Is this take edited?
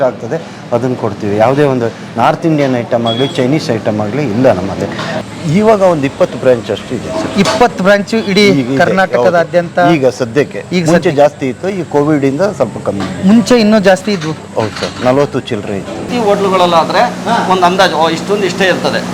yes; 2 cuts; at 5.1 s, 16.1 s

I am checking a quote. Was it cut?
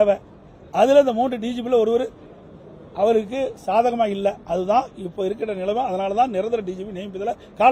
no; 0 cuts

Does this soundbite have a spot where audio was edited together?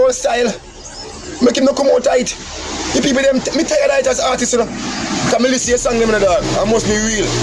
no; 0 cuts

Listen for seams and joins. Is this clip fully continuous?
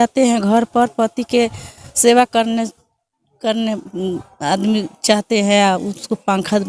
yes; 0 cuts

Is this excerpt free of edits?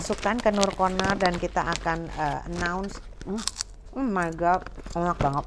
yes; 0 cuts

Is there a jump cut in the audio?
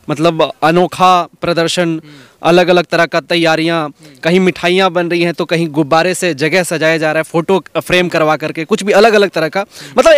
no; 0 cuts

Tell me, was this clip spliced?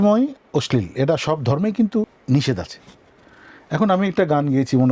yes; 1 cut; at 2.2 s

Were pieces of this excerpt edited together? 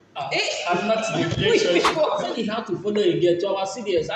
yes; 1 cut; at 2.5 s

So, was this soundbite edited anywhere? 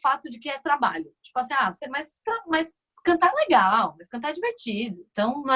no; 0 cuts

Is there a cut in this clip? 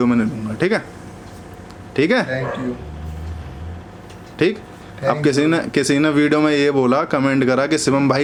no; 0 cuts

